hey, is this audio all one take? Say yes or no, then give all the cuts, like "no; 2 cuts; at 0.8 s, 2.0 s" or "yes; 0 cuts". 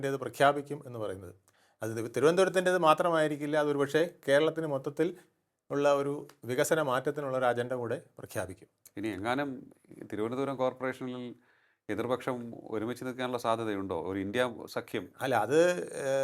yes; 0 cuts